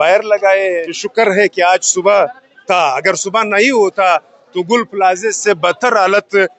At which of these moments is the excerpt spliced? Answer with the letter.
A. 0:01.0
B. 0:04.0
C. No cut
A